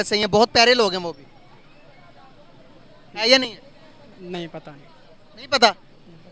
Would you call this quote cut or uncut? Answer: uncut